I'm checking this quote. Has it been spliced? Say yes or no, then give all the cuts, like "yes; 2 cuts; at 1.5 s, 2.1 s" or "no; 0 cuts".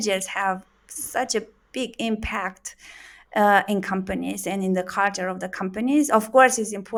no; 0 cuts